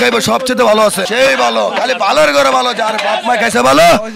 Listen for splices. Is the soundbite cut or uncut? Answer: cut